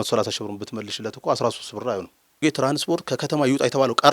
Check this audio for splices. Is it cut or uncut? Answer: cut